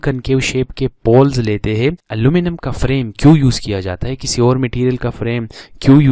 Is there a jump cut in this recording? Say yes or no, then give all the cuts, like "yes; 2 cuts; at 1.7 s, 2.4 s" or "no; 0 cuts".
no; 0 cuts